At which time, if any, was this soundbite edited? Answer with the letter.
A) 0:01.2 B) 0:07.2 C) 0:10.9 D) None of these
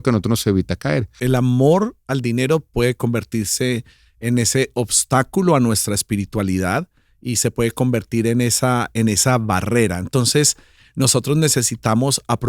A